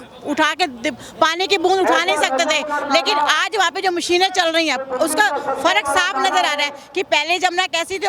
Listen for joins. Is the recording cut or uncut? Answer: uncut